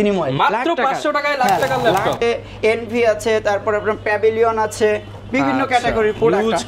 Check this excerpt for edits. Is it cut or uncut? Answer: cut